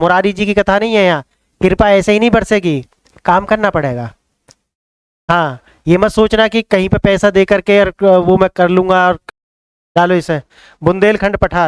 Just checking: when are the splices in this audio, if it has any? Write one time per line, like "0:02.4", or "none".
0:09.2